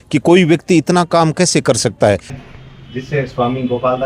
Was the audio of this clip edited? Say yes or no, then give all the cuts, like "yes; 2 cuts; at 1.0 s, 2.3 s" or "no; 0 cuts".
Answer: yes; 1 cut; at 2.3 s